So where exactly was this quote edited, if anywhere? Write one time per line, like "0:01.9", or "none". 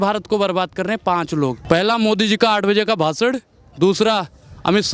0:01.6